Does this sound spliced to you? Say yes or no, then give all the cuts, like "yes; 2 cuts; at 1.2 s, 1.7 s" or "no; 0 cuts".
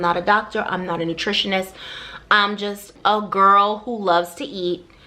yes; 1 cut; at 2.9 s